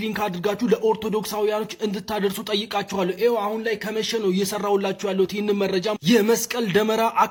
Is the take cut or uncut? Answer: uncut